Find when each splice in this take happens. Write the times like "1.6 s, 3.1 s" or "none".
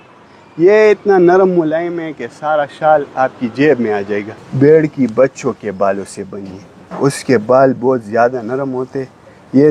4.3 s